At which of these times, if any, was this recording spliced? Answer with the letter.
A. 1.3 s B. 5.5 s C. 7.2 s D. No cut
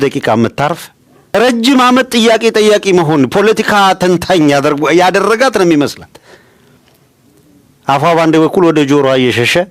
A